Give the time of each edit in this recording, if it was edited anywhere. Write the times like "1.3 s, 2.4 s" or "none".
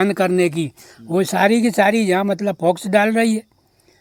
none